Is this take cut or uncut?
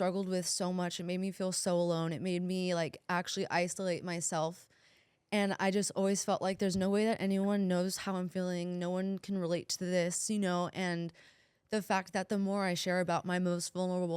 uncut